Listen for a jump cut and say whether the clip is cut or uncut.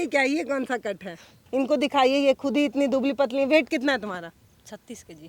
cut